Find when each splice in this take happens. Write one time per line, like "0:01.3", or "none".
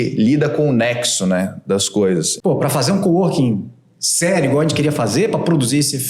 0:02.3